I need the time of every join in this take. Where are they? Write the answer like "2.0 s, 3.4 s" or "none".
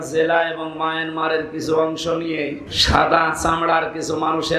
2.7 s